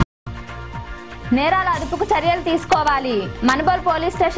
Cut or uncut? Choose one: uncut